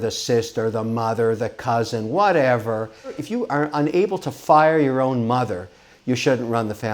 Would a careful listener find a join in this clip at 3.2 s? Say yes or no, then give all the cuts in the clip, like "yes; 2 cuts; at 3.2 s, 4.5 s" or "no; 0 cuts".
yes; 1 cut; at 3.2 s